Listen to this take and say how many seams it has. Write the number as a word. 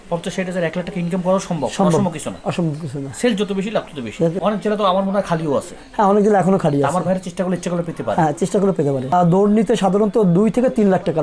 two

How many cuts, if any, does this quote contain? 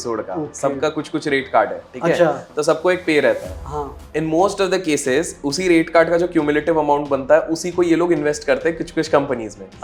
zero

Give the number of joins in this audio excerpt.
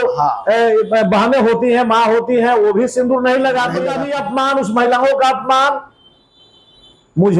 one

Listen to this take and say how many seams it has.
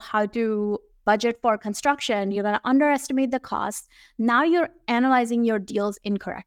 one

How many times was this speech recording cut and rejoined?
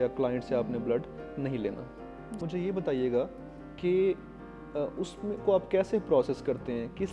one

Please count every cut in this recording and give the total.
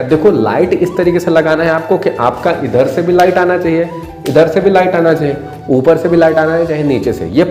zero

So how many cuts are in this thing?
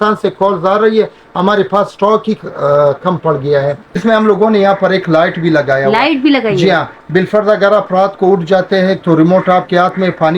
one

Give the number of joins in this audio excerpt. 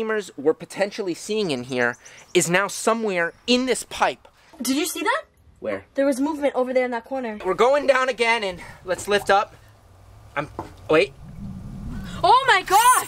two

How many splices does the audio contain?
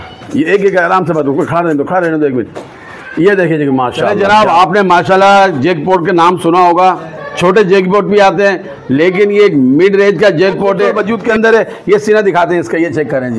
two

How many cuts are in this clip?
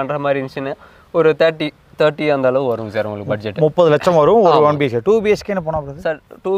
zero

